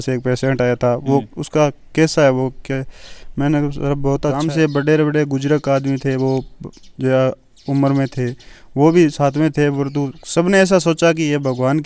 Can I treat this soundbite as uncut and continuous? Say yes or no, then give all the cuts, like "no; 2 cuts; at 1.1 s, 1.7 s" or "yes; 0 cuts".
no; 1 cut; at 4.4 s